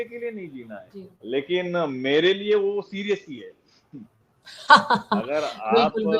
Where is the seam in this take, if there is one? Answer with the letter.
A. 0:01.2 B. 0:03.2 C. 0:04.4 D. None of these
A